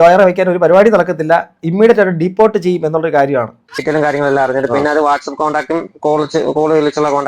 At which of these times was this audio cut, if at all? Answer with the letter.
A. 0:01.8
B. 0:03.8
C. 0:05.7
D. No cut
B